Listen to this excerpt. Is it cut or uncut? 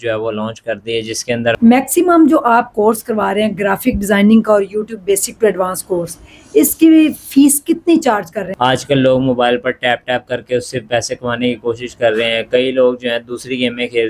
cut